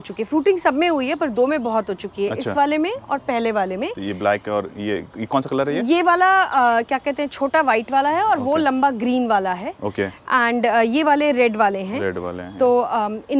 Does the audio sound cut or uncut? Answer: uncut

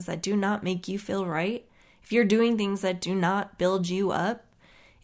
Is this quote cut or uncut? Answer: uncut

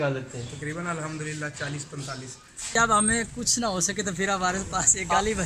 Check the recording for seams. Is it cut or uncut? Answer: cut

